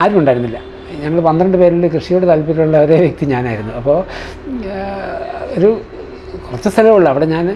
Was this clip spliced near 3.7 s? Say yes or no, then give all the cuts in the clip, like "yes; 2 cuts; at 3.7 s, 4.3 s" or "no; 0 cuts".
no; 0 cuts